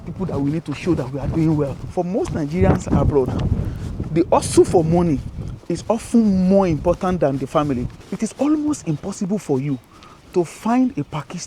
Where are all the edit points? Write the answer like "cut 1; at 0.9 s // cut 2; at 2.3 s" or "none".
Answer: cut 1; at 1.8 s // cut 2; at 8.0 s